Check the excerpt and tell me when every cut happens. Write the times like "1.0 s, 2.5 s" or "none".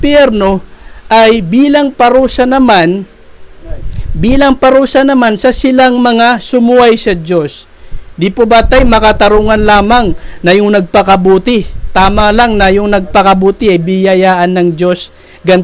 none